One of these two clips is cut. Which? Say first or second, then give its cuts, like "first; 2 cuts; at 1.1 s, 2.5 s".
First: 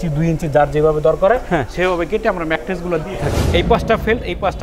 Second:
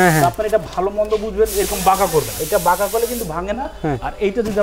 first; 1 cut; at 3.4 s